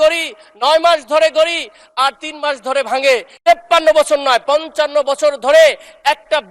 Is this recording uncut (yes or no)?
no